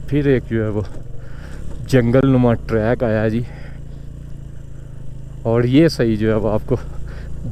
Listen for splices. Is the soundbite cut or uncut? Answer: uncut